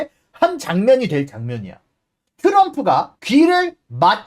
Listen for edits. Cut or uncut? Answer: cut